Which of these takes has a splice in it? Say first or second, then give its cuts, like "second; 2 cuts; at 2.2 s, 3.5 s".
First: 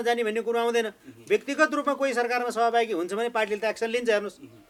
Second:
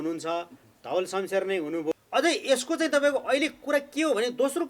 second; 1 cut; at 1.9 s